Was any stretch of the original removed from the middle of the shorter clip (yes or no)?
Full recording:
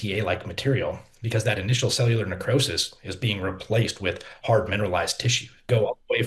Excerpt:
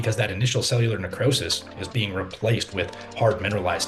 no